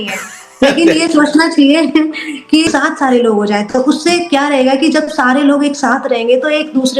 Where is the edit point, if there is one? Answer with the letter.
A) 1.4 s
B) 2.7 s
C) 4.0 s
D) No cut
B